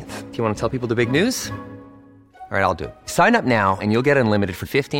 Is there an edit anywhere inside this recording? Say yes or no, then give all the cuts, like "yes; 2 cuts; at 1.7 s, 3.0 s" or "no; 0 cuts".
no; 0 cuts